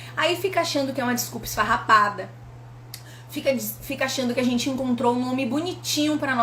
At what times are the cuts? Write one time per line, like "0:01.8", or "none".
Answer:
none